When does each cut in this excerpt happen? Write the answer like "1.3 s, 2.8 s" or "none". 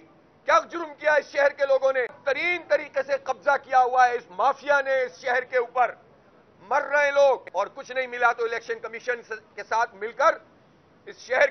2.2 s, 7.5 s